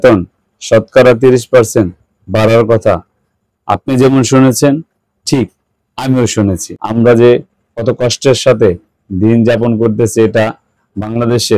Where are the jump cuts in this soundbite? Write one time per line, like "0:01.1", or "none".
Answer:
0:06.7